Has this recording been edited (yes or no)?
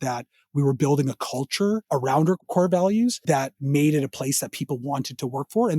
yes